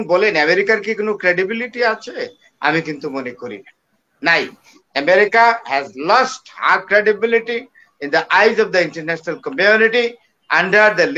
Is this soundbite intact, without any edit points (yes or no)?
yes